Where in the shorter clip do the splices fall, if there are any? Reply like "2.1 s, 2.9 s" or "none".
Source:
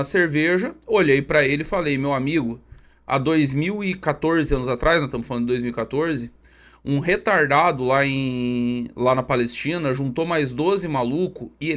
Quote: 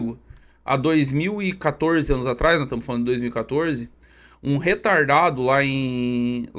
none